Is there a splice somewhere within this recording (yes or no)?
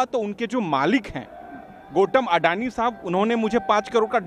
no